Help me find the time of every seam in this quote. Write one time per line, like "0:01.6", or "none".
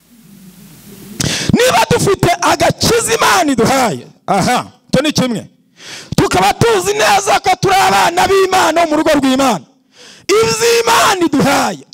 none